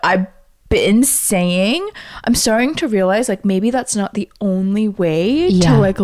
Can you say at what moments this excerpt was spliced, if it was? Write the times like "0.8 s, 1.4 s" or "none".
none